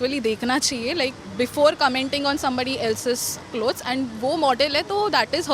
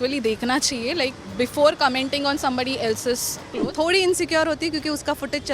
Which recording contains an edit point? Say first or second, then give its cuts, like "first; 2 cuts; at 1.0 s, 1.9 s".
second; 1 cut; at 3.6 s